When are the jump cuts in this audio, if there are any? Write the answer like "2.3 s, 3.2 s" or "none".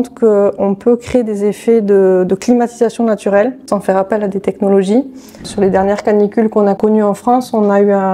3.6 s, 5.2 s